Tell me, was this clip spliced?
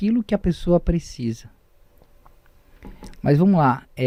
no; 0 cuts

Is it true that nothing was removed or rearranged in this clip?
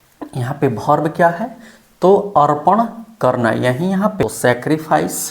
no; 1 cut; at 4.2 s

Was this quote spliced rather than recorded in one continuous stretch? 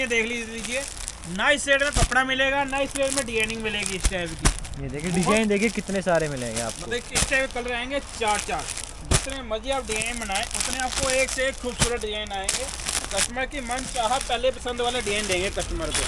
no; 0 cuts

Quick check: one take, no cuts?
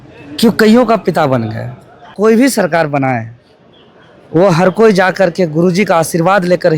no; 1 cut; at 2.1 s

